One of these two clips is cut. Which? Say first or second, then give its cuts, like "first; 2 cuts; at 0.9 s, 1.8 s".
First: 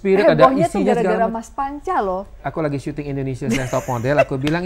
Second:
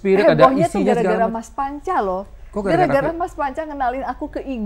first; 1 cut; at 2.4 s